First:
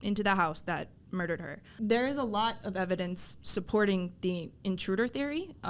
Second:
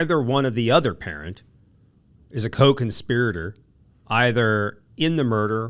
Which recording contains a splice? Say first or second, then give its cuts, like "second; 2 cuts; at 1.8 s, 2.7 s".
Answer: first; 1 cut; at 1.6 s